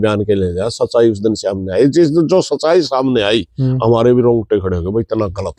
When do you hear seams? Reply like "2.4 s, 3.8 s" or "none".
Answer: none